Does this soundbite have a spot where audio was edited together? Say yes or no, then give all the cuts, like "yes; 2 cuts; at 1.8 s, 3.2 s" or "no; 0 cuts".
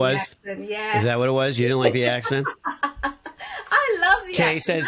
no; 0 cuts